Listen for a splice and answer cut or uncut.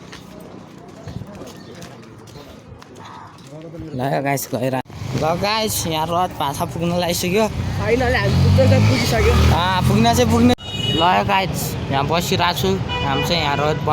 cut